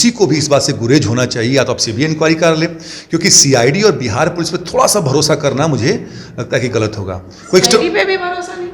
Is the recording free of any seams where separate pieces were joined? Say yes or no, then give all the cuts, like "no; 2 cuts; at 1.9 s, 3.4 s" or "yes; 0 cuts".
yes; 0 cuts